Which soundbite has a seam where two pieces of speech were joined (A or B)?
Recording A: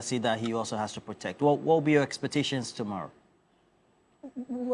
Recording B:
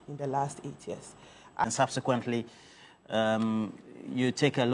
B